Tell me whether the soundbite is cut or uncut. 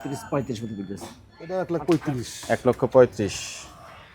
cut